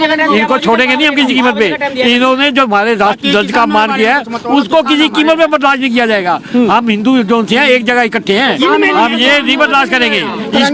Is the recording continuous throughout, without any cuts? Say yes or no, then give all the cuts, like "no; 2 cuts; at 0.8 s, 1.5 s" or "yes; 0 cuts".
yes; 0 cuts